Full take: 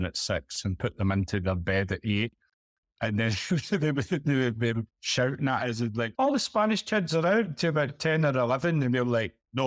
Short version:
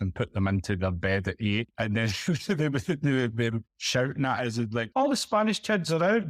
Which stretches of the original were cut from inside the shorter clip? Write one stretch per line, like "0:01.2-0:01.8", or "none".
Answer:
0:02.3-0:02.9